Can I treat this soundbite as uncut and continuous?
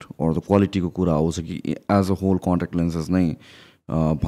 yes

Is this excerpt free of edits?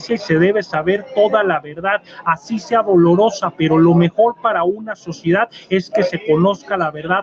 yes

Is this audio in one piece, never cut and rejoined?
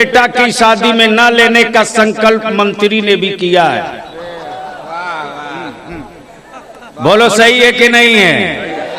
yes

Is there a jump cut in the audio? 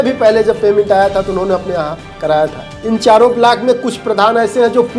yes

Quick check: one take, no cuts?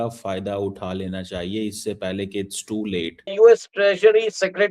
no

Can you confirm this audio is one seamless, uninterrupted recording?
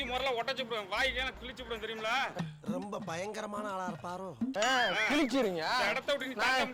yes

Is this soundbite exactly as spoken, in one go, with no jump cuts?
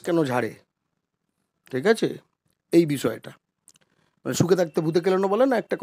yes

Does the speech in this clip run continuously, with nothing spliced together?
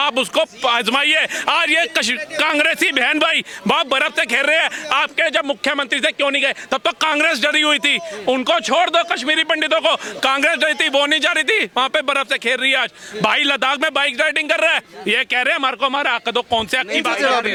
yes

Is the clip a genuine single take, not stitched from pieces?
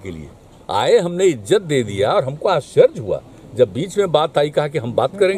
yes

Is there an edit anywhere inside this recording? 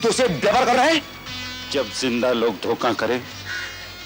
yes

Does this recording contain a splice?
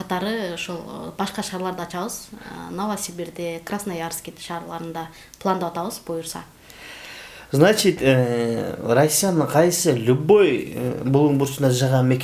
no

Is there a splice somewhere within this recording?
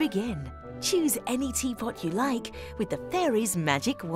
no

